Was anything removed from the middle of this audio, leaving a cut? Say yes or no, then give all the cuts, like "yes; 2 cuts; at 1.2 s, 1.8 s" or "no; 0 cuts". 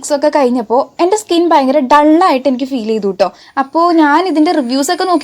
yes; 1 cut; at 3.4 s